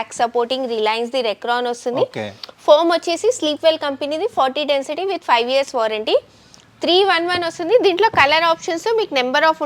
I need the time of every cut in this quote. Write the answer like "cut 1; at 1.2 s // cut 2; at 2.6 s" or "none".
none